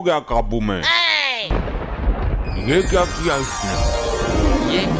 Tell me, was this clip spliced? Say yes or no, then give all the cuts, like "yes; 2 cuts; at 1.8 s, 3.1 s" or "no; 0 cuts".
yes; 1 cut; at 1.5 s